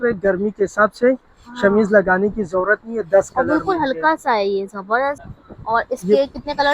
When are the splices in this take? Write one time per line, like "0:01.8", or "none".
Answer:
0:05.2